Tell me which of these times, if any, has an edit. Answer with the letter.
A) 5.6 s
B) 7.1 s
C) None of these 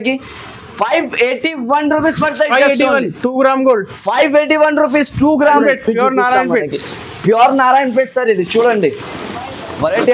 A